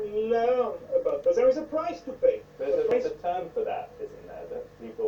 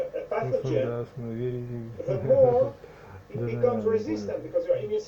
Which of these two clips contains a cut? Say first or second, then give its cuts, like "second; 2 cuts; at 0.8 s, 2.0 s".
first; 1 cut; at 2.9 s